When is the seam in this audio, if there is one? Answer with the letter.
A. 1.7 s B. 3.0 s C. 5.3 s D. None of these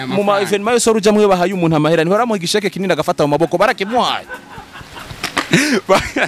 D